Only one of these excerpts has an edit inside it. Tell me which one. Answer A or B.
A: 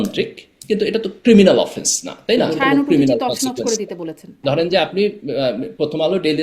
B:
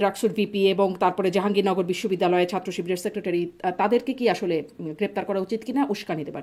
A